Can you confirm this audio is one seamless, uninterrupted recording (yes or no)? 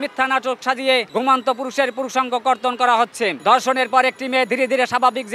no